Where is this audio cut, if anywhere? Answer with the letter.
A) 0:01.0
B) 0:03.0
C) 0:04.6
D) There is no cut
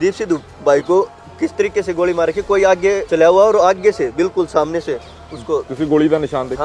B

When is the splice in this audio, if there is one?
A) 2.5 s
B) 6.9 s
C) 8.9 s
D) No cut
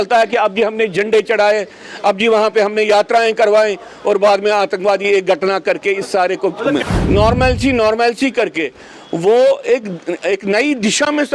B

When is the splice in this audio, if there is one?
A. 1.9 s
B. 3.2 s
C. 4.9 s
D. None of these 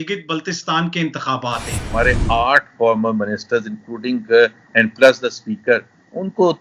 A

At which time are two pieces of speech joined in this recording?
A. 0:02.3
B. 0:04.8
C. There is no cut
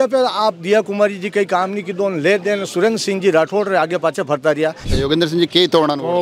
B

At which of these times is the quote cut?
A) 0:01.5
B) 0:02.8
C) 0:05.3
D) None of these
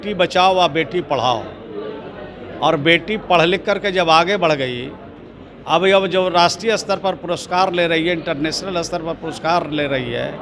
D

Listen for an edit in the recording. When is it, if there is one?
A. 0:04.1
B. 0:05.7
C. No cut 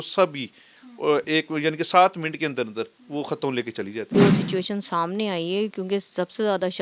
A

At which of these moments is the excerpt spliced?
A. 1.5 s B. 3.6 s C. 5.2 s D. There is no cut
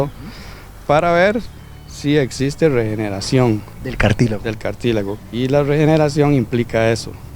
C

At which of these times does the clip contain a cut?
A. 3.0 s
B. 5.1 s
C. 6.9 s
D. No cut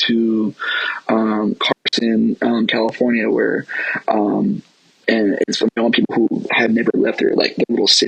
D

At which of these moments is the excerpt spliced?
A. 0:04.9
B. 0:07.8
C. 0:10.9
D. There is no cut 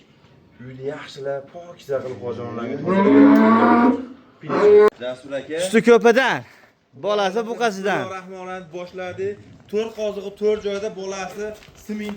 A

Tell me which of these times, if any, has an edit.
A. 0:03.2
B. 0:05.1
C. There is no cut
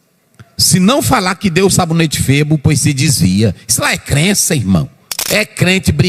B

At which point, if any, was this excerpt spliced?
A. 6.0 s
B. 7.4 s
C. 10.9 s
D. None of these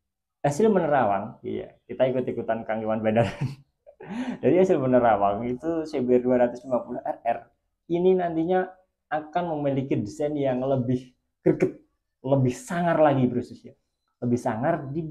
D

